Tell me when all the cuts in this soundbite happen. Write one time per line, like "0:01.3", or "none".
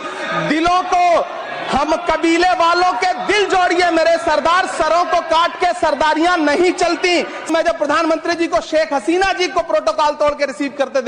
0:07.5